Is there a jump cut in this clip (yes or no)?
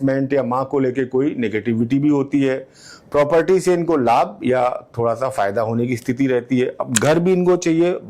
no